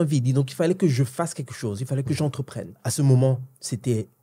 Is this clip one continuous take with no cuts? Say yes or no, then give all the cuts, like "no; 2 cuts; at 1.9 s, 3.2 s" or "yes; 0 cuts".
no; 1 cut; at 2.8 s